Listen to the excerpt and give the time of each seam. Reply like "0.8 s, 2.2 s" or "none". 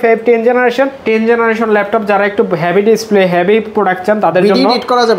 1.0 s